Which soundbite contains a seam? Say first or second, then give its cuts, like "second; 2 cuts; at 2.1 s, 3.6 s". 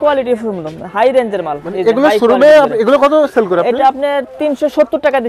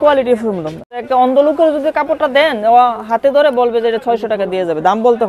second; 1 cut; at 1.0 s